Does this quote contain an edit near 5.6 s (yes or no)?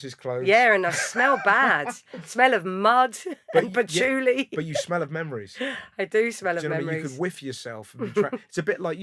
no